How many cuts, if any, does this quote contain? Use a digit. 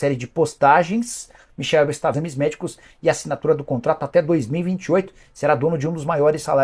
1